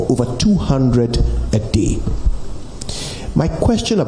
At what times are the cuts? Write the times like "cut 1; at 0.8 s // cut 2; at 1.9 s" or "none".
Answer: none